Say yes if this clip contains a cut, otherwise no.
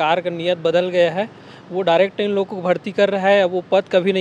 no